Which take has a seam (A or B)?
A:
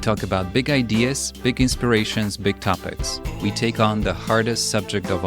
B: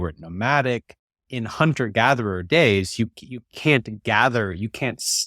B